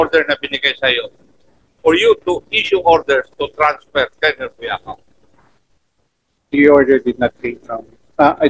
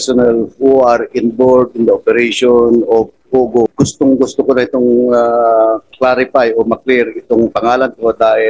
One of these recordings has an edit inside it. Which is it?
second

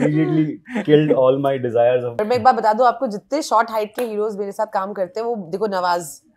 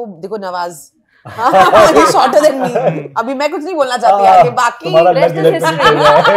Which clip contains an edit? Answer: first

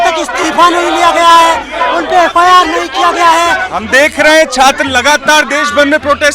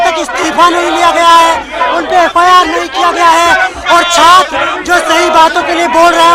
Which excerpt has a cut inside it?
first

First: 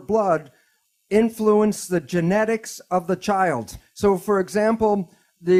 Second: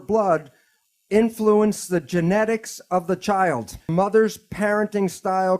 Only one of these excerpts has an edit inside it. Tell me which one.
second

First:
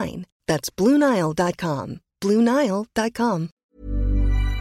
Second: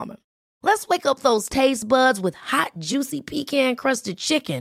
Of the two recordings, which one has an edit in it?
first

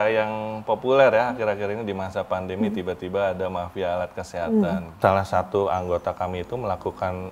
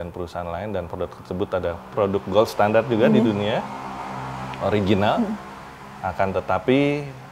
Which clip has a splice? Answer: first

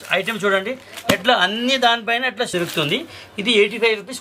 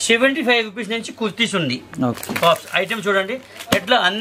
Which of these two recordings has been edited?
first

